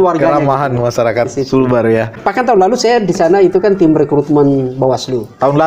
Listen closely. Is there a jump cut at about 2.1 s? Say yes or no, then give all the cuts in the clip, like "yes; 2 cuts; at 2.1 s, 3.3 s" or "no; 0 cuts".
yes; 1 cut; at 2.1 s